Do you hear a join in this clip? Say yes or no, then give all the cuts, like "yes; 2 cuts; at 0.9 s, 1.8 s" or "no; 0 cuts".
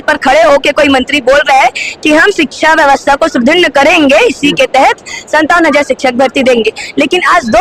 no; 0 cuts